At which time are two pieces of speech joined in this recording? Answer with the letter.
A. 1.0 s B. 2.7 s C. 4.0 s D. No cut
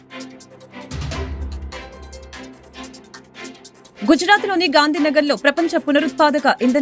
A